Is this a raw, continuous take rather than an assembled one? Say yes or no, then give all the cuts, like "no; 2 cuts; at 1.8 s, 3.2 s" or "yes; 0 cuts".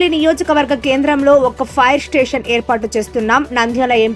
yes; 0 cuts